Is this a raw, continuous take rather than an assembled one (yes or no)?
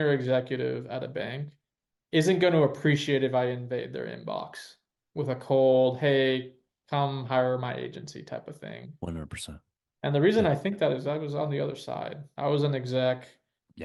yes